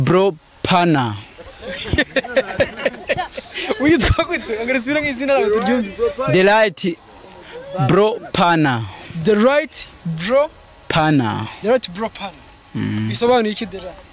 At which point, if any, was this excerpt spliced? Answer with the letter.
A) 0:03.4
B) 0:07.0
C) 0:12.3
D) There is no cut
D